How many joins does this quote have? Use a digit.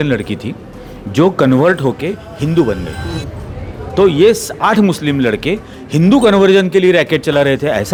0